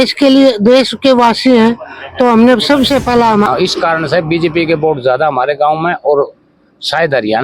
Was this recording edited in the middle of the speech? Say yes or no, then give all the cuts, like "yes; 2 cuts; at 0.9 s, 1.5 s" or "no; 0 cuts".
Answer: yes; 1 cut; at 3.5 s